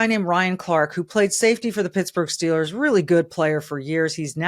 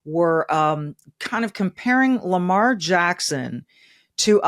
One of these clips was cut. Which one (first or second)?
second